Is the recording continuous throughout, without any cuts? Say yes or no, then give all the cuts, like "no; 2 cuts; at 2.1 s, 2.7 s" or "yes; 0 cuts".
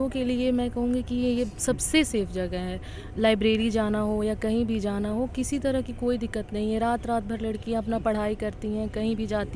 yes; 0 cuts